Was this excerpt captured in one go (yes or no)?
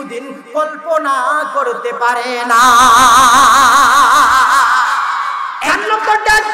no